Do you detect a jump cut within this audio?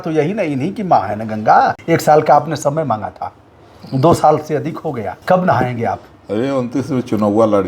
yes; 2 cuts; at 1.8 s, 5.1 s

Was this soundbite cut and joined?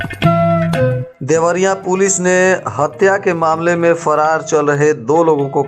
yes; 1 cut; at 1.1 s

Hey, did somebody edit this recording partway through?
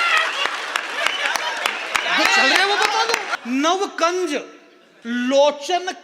yes; 1 cut; at 3.3 s

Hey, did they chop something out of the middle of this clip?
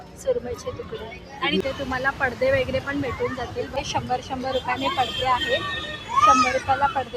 yes; 2 cuts; at 1.6 s, 3.8 s

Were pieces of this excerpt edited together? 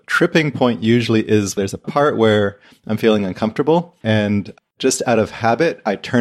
yes; 2 cuts; at 1.6 s, 3.9 s

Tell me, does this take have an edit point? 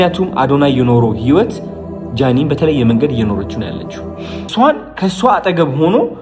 yes; 1 cut; at 4.5 s

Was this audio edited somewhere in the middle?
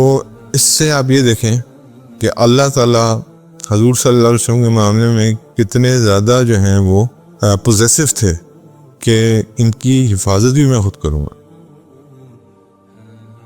yes; 2 cuts; at 7.2 s, 11.8 s

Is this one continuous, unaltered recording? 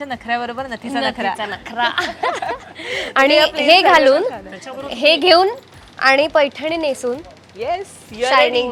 yes; 0 cuts

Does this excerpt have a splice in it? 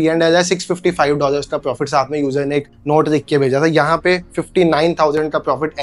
no; 0 cuts

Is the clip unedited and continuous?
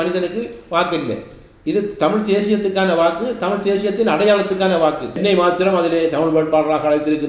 no; 1 cut; at 5.2 s

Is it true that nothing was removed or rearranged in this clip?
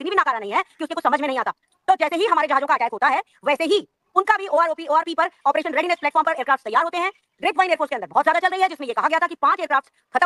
yes; 0 cuts

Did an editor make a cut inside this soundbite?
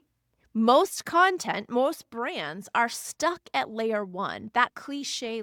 no; 0 cuts

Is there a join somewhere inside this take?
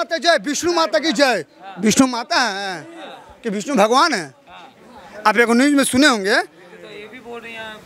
no; 0 cuts

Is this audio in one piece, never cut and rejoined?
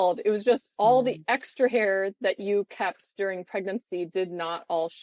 yes; 0 cuts

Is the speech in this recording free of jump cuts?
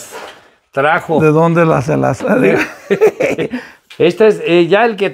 no; 1 cut; at 3.7 s

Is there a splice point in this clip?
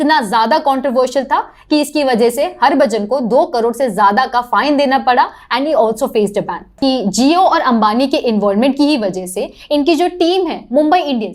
yes; 1 cut; at 6.7 s

